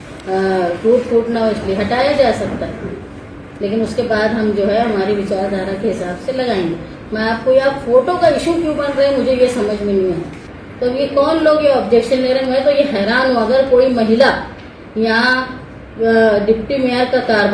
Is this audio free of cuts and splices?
yes; 0 cuts

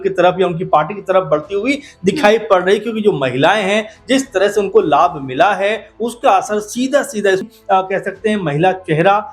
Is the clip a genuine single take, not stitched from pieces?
no; 1 cut; at 7.4 s

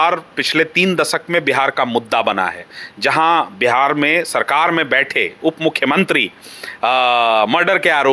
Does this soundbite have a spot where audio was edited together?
no; 0 cuts

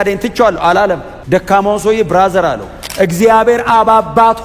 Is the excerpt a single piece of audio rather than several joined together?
no; 2 cuts; at 1.1 s, 2.8 s

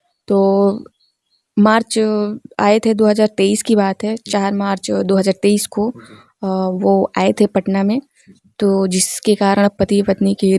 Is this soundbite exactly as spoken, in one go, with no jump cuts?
yes; 0 cuts

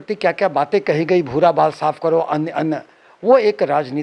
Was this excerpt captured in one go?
yes; 0 cuts

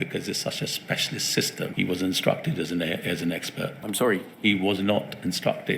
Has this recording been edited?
yes; 2 cuts; at 1.7 s, 3.8 s

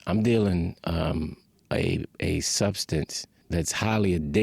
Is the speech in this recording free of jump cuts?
no; 1 cut; at 3.3 s

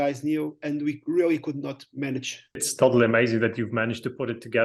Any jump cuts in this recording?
yes; 1 cut; at 2.7 s

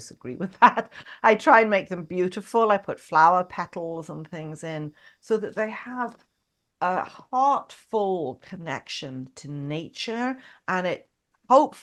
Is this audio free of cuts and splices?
yes; 0 cuts

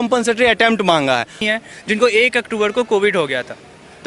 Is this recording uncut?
no; 1 cut; at 1.4 s

